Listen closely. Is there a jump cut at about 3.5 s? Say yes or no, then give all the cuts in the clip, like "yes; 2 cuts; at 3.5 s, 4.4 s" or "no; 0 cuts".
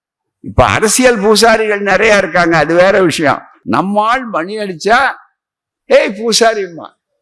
yes; 1 cut; at 3.5 s